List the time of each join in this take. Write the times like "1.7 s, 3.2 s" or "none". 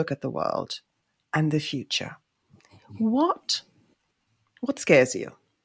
none